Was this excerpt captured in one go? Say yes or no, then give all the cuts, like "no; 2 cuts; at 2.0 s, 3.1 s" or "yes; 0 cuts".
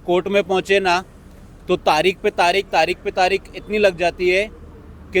yes; 0 cuts